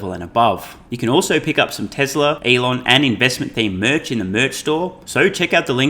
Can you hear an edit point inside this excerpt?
yes; 3 cuts; at 0.8 s, 2.4 s, 5.0 s

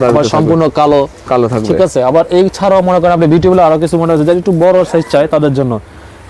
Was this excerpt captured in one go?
yes; 0 cuts

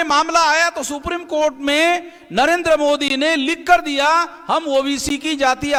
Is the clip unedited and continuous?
yes; 0 cuts

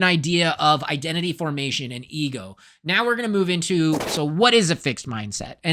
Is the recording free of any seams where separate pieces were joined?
no; 1 cut; at 4.1 s

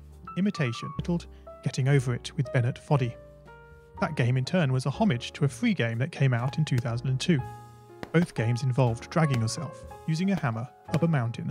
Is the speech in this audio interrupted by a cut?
yes; 1 cut; at 1.0 s

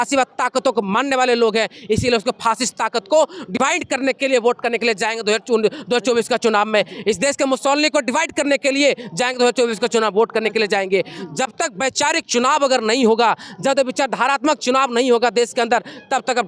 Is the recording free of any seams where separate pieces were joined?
yes; 0 cuts

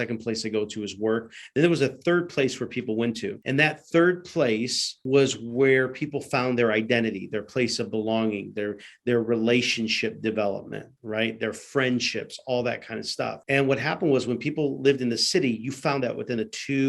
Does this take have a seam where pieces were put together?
yes; 3 cuts; at 3.4 s, 5.0 s, 13.4 s

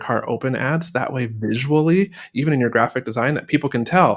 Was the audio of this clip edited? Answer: no; 0 cuts

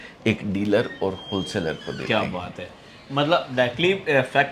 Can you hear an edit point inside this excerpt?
no; 0 cuts

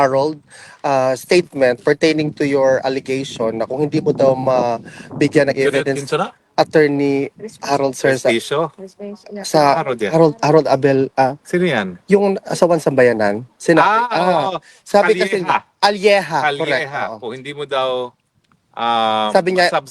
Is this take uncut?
no; 1 cut; at 13.8 s

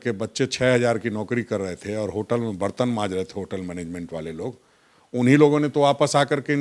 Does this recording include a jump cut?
no; 0 cuts

